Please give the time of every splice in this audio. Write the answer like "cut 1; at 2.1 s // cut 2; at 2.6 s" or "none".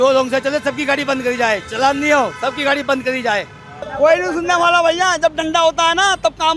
cut 1; at 3.8 s

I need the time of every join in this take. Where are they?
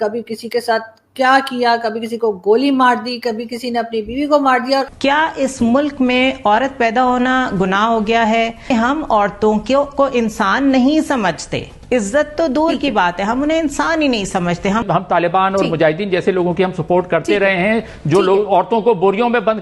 cut 1; at 4.9 s // cut 2; at 8.6 s // cut 3; at 14.8 s

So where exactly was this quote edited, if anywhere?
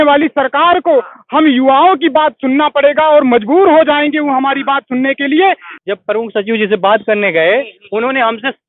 cut 1; at 5.7 s

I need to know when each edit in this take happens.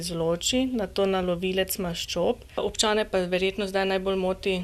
cut 1; at 2.6 s

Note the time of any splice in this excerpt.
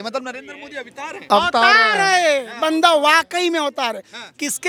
none

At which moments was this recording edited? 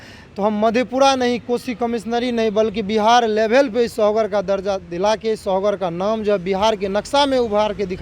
none

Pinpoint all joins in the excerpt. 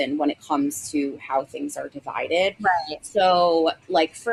none

